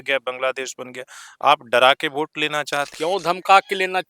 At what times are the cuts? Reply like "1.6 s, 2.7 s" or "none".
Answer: 2.9 s